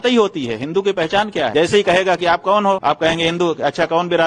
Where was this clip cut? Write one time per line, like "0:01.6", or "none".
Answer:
0:01.5
0:02.8